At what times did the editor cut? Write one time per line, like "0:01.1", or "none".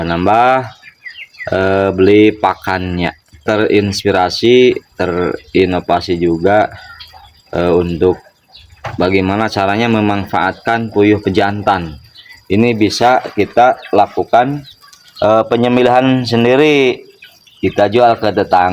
0:03.4